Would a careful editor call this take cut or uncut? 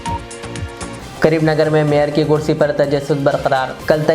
cut